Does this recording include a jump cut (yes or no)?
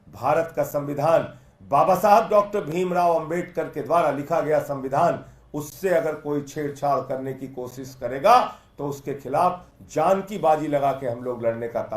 no